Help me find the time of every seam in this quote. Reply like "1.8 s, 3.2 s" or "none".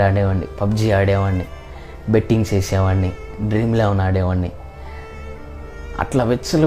none

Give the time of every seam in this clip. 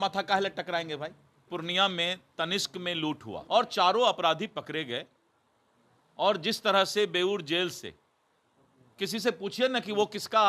1.5 s, 3.4 s

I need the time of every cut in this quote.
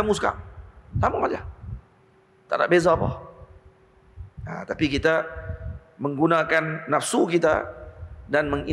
none

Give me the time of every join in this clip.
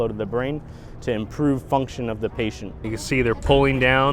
2.7 s

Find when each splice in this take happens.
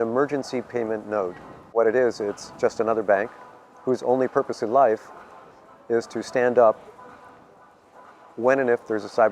1.7 s

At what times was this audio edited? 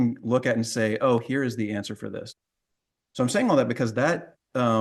none

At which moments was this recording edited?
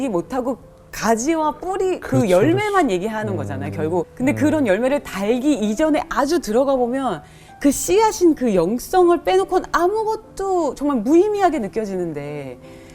4.1 s

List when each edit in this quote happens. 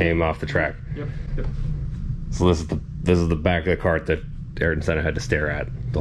none

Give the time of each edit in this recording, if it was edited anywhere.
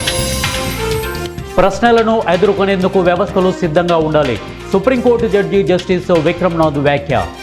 1.3 s

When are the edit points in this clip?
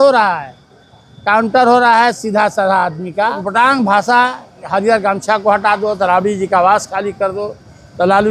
3.4 s

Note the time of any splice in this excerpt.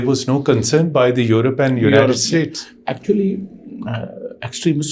none

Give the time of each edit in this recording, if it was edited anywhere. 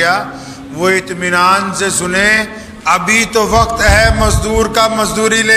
none

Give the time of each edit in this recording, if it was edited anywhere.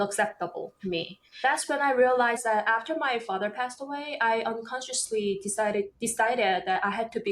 1.4 s, 2.4 s

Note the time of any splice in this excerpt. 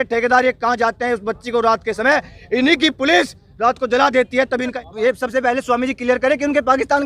4.8 s

